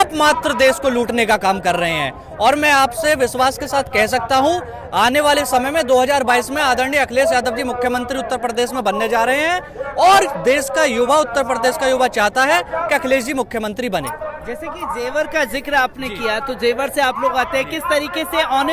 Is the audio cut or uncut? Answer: uncut